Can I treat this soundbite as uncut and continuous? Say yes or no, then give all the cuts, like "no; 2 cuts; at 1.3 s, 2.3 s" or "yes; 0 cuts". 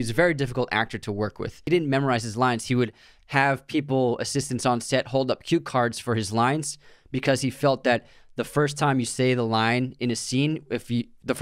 no; 1 cut; at 1.6 s